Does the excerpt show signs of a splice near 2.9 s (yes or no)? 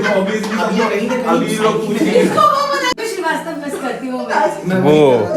yes